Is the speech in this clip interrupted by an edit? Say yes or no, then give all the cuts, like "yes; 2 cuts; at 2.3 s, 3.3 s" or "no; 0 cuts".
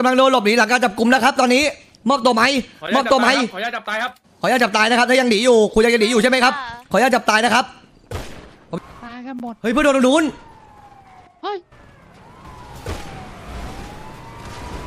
yes; 2 cuts; at 8.8 s, 12.4 s